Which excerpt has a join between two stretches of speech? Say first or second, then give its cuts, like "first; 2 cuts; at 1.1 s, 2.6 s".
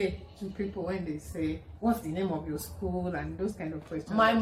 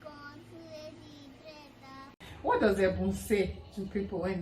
second; 1 cut; at 2.4 s